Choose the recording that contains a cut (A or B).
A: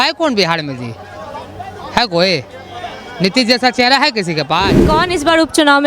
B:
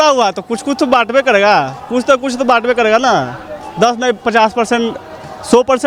A